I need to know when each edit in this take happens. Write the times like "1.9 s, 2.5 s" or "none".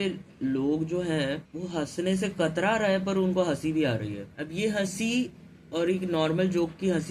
1.5 s, 4.3 s